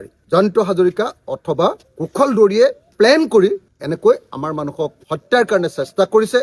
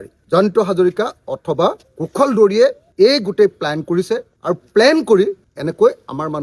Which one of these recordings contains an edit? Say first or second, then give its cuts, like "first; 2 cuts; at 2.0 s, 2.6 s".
first; 1 cut; at 2.8 s